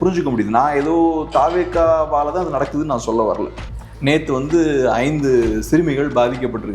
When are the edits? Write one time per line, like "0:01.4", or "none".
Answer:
0:03.6